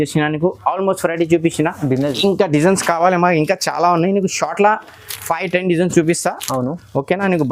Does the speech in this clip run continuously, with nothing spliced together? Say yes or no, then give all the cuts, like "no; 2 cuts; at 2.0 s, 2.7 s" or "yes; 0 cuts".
no; 1 cut; at 2.1 s